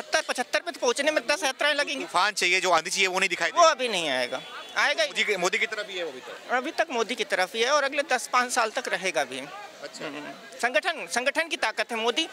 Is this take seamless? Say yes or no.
yes